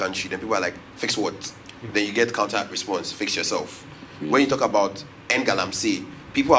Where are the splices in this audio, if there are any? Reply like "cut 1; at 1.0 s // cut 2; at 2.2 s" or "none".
none

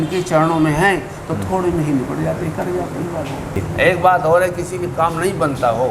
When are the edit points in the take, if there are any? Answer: cut 1; at 3.6 s

